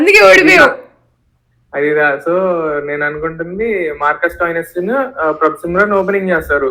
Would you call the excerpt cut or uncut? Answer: uncut